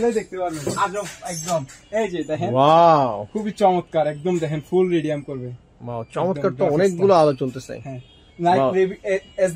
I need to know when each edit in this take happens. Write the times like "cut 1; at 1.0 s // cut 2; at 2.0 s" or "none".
none

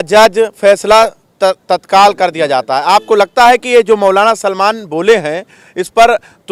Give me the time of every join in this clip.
none

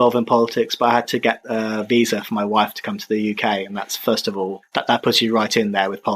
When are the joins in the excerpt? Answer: none

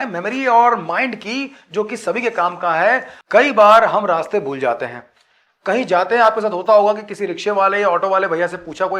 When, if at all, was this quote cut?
cut 1; at 3.1 s

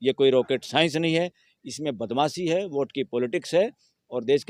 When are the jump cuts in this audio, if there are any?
none

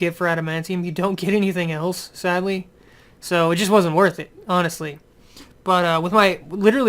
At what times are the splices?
cut 1; at 2.9 s

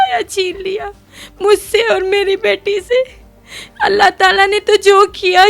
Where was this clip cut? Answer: none

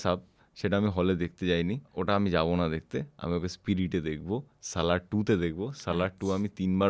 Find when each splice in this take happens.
cut 1; at 1.9 s

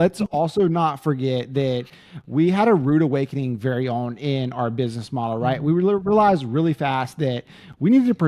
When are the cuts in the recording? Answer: none

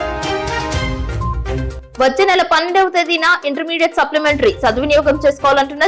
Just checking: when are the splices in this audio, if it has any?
cut 1; at 1.8 s

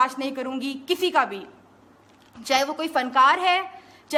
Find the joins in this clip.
none

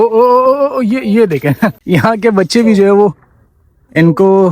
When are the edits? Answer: cut 1; at 1.7 s

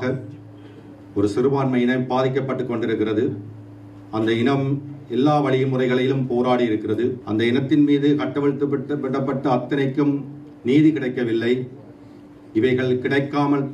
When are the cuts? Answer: cut 1; at 7.2 s

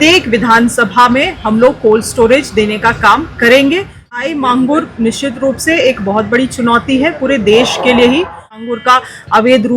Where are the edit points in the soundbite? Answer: cut 1; at 4.3 s // cut 2; at 8.6 s

